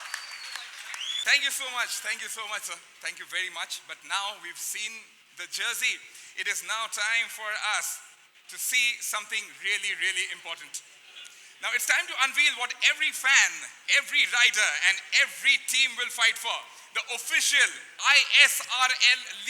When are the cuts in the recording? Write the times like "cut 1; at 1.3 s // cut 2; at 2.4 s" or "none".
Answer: cut 1; at 1.1 s